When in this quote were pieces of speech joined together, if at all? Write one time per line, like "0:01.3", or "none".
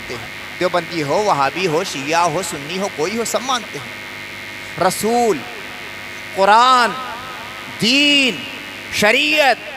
none